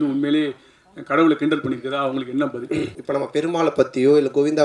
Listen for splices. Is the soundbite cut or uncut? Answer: cut